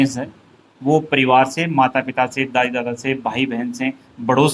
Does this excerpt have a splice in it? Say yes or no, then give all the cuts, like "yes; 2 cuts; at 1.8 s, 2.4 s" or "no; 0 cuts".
no; 0 cuts